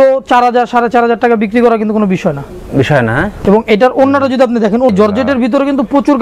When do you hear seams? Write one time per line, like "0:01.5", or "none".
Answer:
0:04.9